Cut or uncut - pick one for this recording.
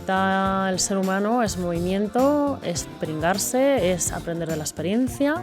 uncut